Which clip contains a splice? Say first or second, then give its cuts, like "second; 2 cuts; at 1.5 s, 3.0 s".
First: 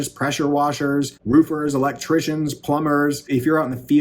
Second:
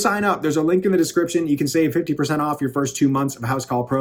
first; 2 cuts; at 1.2 s, 3.3 s